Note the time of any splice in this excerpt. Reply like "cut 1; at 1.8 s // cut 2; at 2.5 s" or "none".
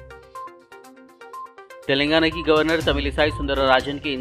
cut 1; at 1.4 s